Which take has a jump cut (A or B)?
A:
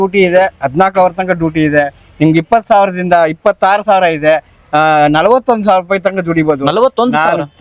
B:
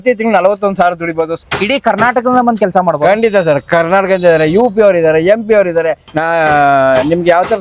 B